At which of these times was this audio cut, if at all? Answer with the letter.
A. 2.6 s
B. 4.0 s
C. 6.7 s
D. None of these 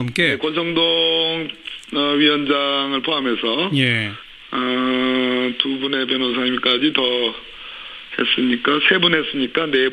D